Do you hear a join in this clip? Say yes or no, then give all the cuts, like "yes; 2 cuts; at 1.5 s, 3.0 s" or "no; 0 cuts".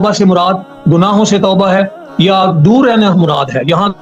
no; 0 cuts